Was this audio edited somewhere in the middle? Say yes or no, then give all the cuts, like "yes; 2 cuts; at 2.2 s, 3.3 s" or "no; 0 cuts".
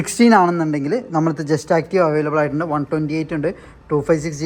no; 0 cuts